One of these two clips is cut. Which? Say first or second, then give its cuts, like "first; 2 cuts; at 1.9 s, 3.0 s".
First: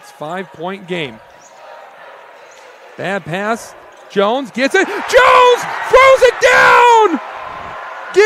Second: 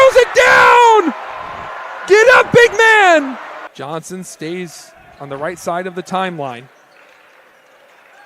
second; 1 cut; at 3.6 s